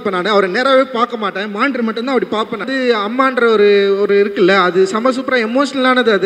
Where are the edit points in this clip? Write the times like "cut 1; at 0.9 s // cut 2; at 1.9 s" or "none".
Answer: cut 1; at 2.6 s

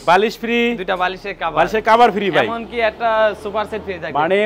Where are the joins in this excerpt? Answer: none

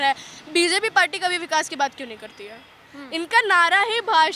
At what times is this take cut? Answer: none

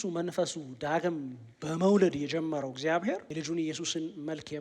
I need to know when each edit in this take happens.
cut 1; at 3.3 s

